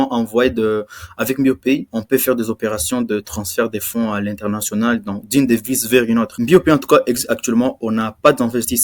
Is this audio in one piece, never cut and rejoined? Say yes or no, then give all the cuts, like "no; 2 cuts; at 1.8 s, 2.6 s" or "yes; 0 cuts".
no; 2 cuts; at 1.9 s, 6.4 s